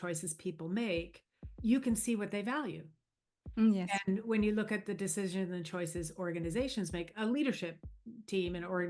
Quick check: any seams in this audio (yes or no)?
no